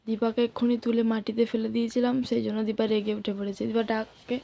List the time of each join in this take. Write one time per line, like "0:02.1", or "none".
none